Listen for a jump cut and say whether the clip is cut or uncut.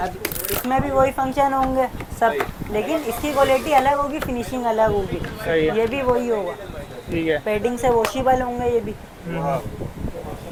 uncut